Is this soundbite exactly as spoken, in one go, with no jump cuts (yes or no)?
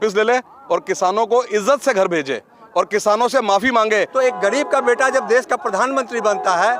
no